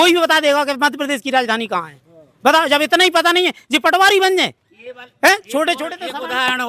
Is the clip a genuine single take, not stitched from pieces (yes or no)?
yes